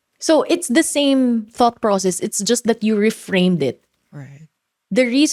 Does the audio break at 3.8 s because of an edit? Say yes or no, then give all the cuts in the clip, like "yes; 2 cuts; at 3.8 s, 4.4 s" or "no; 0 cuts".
no; 0 cuts